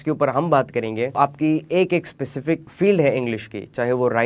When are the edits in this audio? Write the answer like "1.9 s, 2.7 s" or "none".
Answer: 1.2 s, 2.7 s